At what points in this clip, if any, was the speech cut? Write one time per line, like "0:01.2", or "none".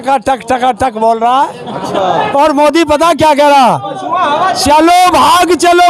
0:01.9